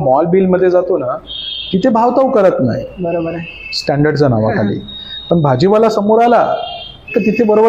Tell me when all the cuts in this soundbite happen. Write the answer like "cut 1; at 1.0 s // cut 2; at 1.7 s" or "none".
none